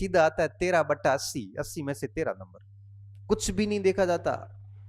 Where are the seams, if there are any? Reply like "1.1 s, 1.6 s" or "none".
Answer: none